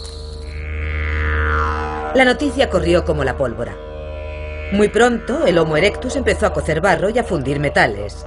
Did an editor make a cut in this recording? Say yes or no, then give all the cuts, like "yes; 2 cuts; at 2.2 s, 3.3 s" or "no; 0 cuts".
no; 0 cuts